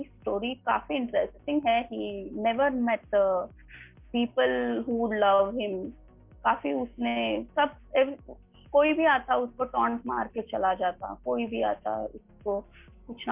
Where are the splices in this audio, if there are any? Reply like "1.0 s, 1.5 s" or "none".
none